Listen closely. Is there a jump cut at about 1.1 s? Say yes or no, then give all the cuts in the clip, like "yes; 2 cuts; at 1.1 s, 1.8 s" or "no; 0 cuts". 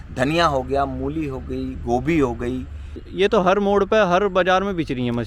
no; 1 cut; at 3.2 s